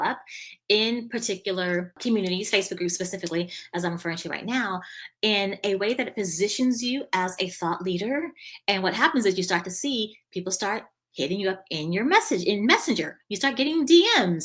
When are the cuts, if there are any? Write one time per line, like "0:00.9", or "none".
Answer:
0:02.0